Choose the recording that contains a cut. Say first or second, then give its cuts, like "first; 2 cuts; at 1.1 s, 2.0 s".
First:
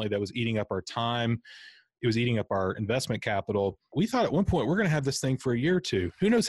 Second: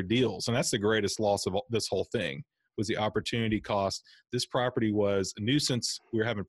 first; 1 cut; at 3.9 s